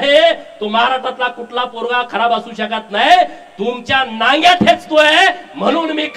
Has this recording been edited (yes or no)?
no